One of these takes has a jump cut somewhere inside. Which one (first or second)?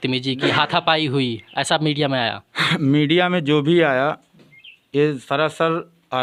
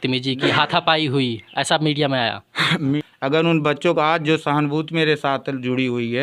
second